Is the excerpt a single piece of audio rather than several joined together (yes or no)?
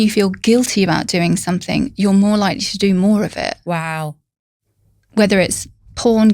yes